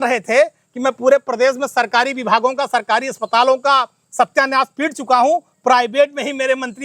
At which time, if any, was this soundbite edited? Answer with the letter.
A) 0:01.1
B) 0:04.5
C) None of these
C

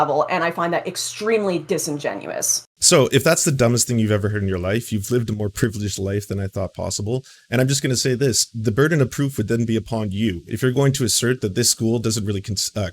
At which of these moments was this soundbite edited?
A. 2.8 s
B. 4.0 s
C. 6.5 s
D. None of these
A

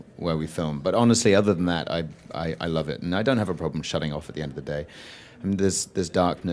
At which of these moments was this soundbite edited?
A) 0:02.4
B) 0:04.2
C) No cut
B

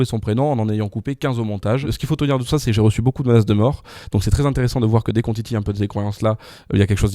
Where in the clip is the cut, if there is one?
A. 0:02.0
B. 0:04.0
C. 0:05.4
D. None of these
A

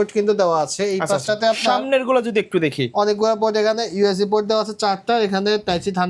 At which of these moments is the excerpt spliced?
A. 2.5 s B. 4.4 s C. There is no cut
C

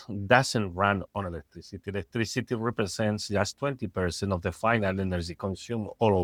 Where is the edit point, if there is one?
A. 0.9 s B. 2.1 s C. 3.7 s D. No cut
D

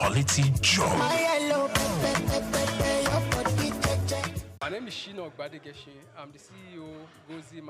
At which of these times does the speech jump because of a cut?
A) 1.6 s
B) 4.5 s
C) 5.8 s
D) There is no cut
B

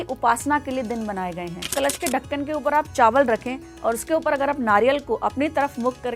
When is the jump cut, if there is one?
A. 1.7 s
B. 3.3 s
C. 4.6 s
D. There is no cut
A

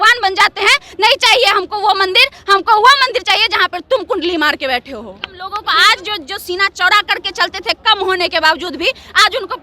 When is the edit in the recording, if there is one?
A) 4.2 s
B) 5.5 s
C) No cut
B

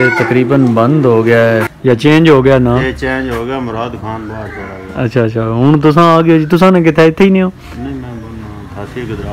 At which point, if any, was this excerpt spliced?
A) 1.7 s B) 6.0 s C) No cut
A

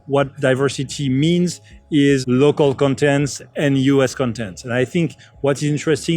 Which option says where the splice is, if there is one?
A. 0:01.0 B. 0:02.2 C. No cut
B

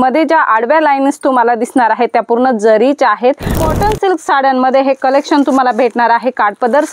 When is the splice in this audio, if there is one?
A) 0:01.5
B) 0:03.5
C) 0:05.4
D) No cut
B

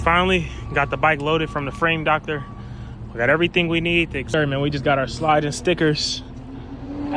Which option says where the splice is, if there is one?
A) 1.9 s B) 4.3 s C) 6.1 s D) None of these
B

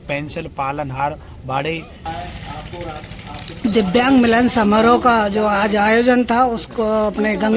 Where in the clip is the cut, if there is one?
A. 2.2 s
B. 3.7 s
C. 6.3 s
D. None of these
A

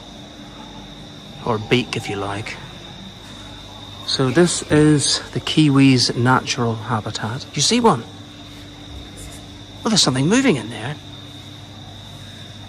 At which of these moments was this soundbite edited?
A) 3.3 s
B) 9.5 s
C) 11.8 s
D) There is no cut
A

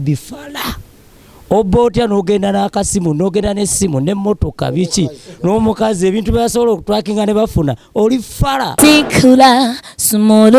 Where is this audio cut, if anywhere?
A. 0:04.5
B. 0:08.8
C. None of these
B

